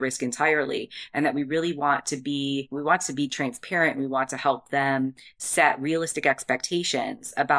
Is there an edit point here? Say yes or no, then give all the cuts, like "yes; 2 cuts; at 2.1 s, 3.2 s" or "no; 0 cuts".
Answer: yes; 1 cut; at 2.7 s